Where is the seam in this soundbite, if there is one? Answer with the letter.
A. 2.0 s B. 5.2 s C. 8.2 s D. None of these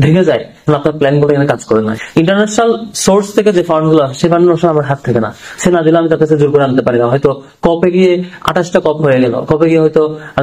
A